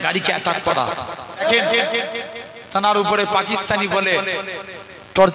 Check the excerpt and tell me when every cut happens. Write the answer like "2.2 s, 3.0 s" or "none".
1.4 s